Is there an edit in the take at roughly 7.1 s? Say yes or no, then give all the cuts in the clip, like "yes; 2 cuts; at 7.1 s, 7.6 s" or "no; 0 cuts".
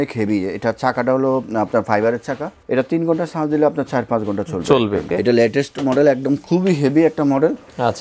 no; 2 cuts; at 2.6 s, 5.1 s